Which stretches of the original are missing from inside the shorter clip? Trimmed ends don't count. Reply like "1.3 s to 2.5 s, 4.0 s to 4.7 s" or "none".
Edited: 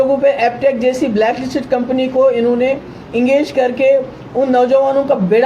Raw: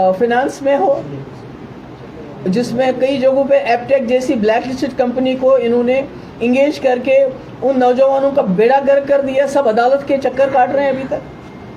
none

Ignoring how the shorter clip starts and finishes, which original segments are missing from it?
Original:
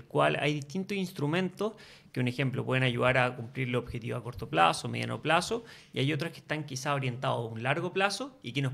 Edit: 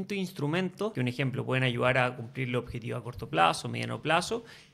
1.7 s to 2.1 s

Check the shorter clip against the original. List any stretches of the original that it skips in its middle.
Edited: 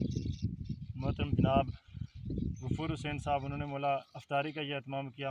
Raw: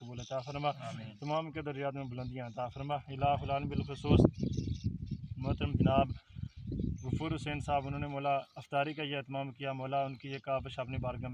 none

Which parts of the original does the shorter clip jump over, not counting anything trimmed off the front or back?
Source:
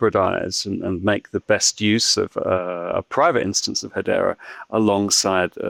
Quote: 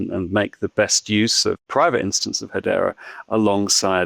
2.4 s to 3.1 s

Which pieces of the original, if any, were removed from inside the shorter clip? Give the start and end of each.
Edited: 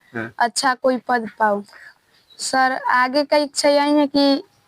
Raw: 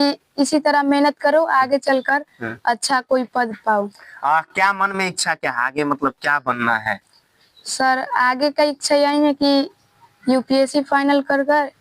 4.1 s to 7.1 s

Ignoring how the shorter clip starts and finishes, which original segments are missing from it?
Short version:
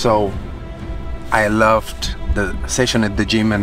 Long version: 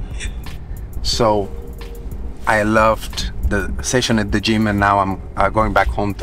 none

